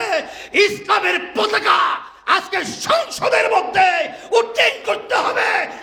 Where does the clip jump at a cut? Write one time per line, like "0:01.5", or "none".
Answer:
none